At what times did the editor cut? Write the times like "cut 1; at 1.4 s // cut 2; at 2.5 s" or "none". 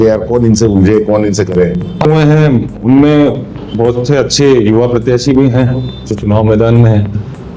cut 1; at 2.0 s